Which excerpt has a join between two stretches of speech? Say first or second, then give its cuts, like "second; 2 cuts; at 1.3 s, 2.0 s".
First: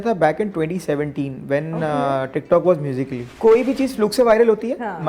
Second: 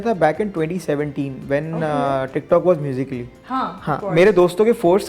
first; 1 cut; at 3.3 s